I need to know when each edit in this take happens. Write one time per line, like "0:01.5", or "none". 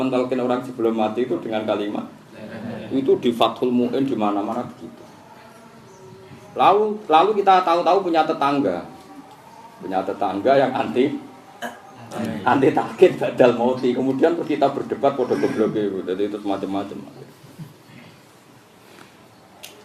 none